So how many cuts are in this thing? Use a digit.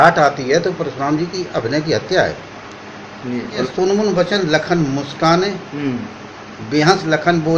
1